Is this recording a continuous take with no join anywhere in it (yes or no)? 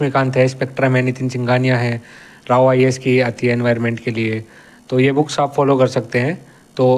yes